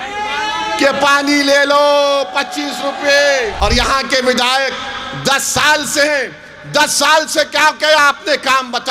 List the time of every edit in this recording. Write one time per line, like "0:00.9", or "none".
0:03.5